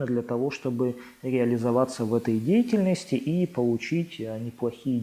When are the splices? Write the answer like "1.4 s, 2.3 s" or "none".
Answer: none